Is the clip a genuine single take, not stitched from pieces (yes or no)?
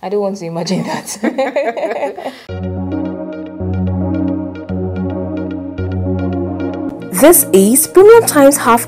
no